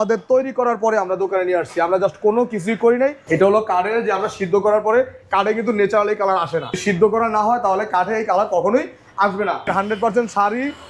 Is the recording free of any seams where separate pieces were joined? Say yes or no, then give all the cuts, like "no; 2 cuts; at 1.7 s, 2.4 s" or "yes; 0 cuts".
no; 3 cuts; at 3.2 s, 6.8 s, 9.7 s